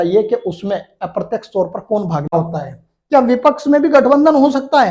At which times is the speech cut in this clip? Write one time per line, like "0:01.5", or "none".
0:02.3